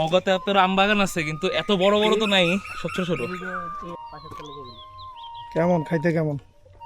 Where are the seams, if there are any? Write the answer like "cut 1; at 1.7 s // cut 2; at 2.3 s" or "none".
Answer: cut 1; at 3.9 s